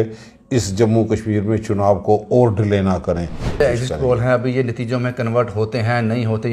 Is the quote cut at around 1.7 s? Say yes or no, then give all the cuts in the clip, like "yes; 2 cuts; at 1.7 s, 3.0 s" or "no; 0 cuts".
no; 1 cut; at 3.6 s